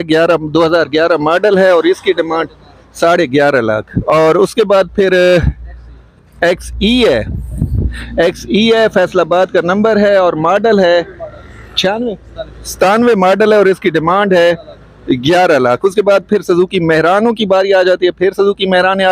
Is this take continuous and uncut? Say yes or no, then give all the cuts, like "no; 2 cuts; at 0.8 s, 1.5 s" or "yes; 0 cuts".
yes; 0 cuts